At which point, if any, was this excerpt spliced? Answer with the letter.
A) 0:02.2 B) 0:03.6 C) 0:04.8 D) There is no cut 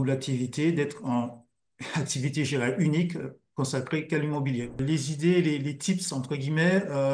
C